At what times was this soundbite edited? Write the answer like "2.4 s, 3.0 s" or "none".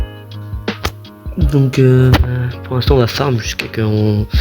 1.0 s